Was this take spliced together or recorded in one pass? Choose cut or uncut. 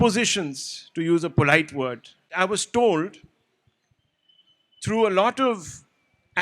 cut